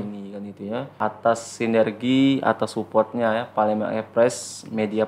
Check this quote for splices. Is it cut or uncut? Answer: cut